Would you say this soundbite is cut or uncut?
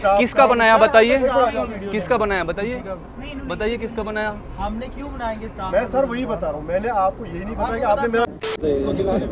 uncut